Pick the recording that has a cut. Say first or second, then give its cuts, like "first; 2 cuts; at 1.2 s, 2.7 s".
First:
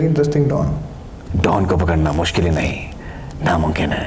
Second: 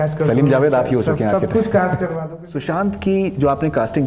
second; 1 cut; at 2.2 s